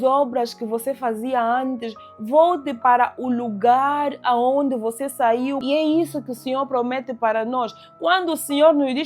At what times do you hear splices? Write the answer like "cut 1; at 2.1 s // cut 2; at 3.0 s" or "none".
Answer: cut 1; at 5.6 s